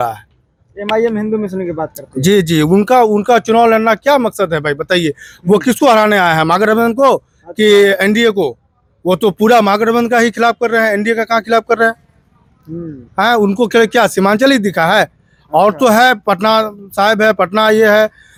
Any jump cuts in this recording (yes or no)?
no